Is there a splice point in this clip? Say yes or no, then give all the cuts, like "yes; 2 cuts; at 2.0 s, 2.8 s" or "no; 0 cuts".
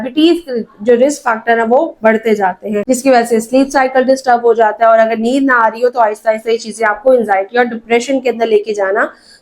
yes; 1 cut; at 2.8 s